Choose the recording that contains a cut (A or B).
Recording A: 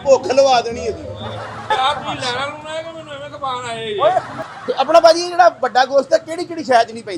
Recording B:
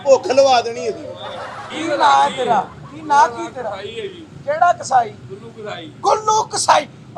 A